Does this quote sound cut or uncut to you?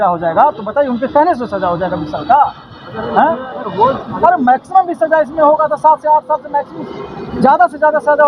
uncut